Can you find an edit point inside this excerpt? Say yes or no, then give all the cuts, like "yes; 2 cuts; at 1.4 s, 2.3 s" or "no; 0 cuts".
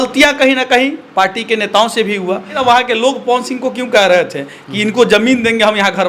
yes; 1 cut; at 2.6 s